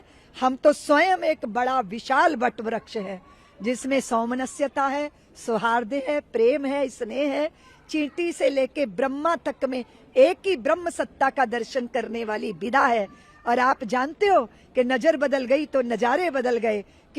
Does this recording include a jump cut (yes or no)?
no